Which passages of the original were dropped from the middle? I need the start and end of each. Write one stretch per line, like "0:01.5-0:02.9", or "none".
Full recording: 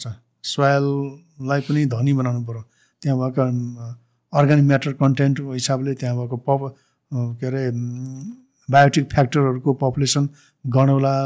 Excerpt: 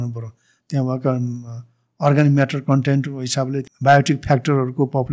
0:06.0-0:08.6